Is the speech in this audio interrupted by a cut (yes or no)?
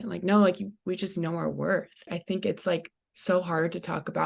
yes